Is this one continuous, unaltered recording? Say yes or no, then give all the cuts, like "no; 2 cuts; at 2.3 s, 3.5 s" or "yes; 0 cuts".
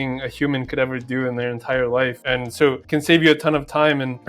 no; 1 cut; at 2.2 s